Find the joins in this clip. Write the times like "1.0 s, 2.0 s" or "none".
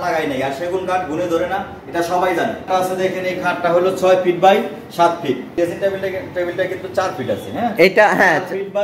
2.7 s, 5.5 s